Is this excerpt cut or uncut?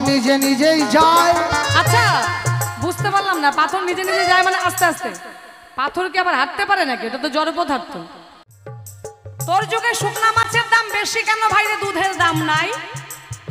cut